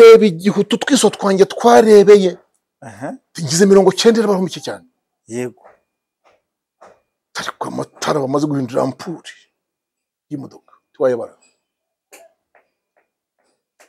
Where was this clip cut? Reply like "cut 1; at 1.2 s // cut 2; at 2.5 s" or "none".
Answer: none